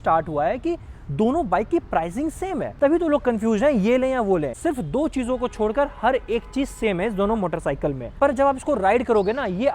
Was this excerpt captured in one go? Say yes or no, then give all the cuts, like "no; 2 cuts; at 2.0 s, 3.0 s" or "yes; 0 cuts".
no; 3 cuts; at 2.7 s, 4.6 s, 8.1 s